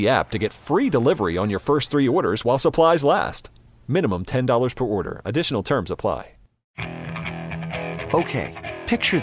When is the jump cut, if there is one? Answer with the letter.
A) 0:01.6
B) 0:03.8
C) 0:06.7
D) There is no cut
C